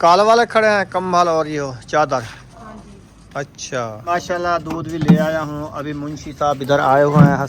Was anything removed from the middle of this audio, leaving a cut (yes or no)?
yes